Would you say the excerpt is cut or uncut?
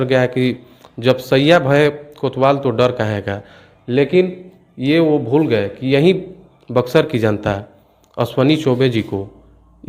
uncut